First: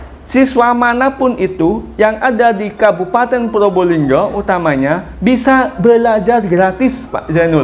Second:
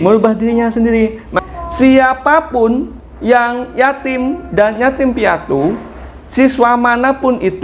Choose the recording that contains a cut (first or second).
second